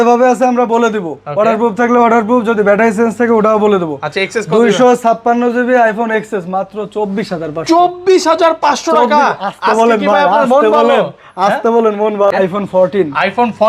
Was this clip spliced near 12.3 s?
yes; 1 cut; at 12.3 s

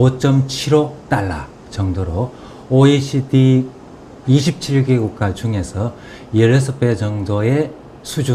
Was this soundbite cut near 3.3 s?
yes; 1 cut; at 3.3 s

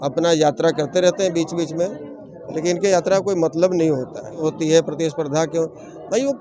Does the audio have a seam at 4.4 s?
yes; 1 cut; at 4.4 s

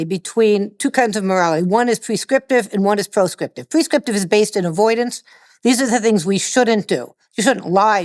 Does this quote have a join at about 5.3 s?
no; 0 cuts

